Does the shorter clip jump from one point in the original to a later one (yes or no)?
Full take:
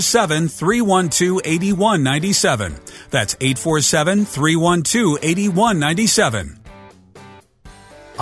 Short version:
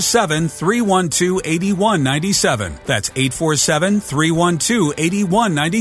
yes